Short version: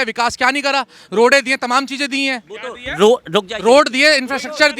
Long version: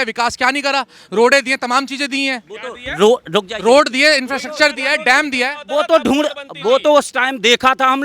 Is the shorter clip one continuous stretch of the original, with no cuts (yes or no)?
yes